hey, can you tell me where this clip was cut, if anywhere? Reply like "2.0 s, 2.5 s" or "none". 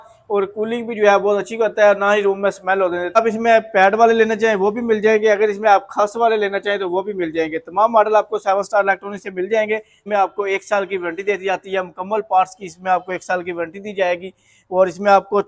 3.2 s, 10.0 s